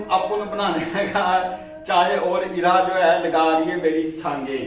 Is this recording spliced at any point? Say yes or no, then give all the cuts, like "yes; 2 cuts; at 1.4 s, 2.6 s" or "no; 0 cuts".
no; 0 cuts